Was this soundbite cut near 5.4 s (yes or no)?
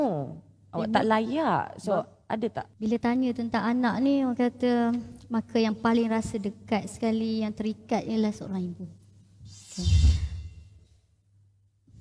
no